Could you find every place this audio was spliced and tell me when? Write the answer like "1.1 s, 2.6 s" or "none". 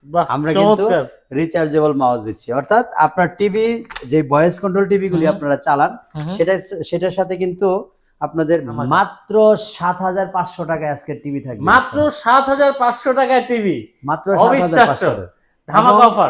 8.7 s